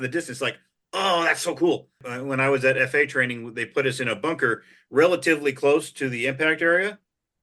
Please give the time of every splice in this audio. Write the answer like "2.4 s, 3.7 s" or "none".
2.1 s